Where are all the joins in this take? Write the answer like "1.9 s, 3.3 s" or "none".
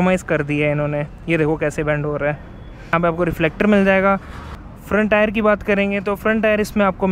none